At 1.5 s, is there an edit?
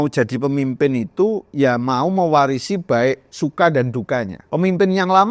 no; 1 cut; at 4.4 s

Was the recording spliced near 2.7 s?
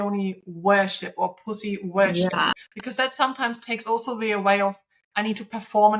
no; 0 cuts

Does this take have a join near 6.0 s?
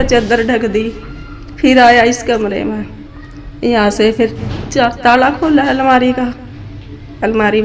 no; 0 cuts

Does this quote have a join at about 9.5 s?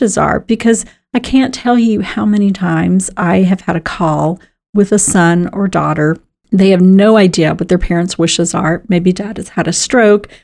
no; 1 cut; at 6.3 s

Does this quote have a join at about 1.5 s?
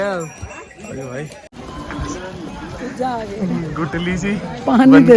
yes; 1 cut; at 1.5 s

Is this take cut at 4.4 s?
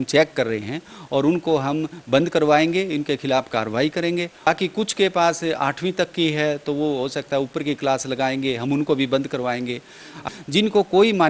yes; 2 cuts; at 4.4 s, 10.2 s

